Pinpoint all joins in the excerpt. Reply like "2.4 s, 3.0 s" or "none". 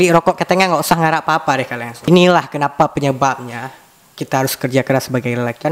none

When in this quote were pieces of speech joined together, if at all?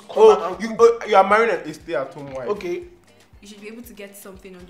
3.0 s

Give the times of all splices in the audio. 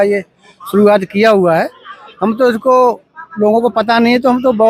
none

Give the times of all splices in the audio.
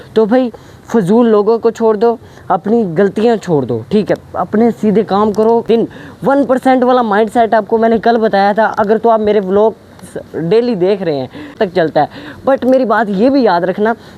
5.6 s, 11.6 s

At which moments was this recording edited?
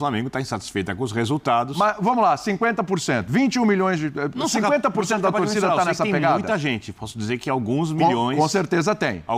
none

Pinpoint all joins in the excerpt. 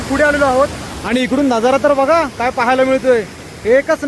none

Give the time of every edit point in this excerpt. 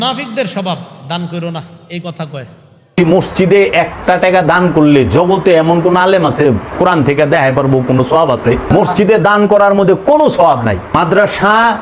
2.9 s, 8.6 s, 11.0 s

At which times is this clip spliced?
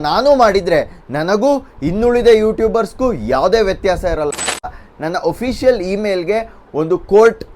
4.9 s

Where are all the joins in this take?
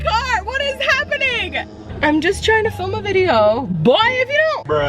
1.8 s

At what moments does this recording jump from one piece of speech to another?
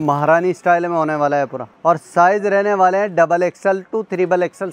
1.6 s

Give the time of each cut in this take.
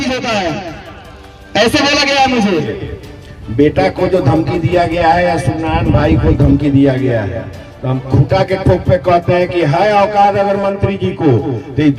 2.7 s

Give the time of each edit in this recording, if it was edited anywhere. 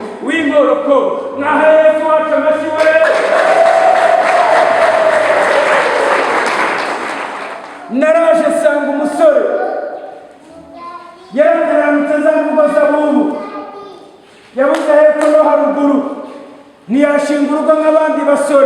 7.4 s

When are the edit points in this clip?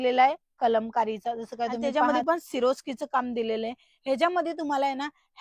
1.8 s

